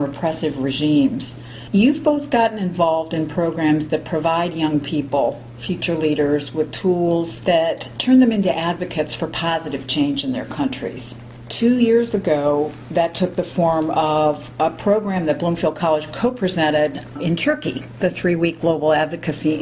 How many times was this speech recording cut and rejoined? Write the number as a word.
zero